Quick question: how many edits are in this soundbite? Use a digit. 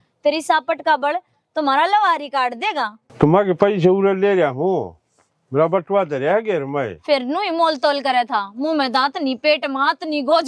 0